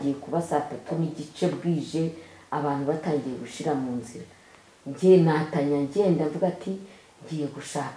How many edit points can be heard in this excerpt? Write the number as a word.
zero